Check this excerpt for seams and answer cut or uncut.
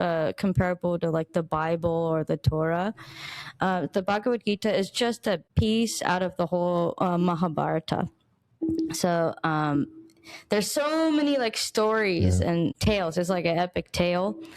cut